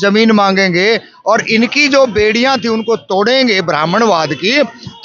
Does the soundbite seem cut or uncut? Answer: uncut